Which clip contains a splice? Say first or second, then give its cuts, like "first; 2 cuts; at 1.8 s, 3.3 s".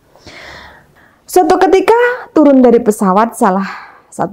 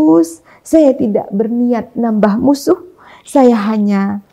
first; 1 cut; at 1.1 s